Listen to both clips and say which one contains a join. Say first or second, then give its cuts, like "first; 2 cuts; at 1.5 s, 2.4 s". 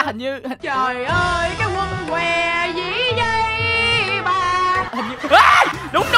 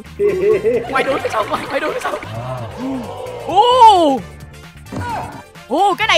second; 2 cuts; at 0.9 s, 2.3 s